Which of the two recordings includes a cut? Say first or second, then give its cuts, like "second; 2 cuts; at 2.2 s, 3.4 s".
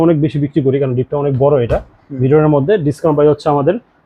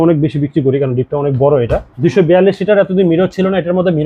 second; 1 cut; at 1.9 s